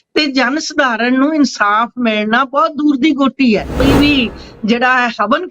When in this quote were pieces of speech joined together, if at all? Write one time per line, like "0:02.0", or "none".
0:03.8